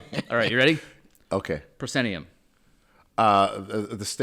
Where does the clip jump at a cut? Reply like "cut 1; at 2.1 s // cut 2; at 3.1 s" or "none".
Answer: none